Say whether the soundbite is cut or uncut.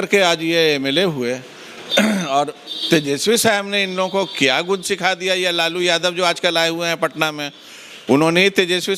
uncut